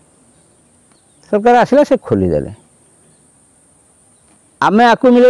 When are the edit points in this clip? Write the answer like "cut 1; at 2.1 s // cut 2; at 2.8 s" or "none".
none